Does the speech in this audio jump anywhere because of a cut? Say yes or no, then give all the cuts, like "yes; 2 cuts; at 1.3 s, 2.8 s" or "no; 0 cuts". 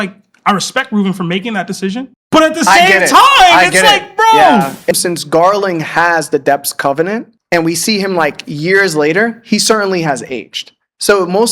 yes; 1 cut; at 4.9 s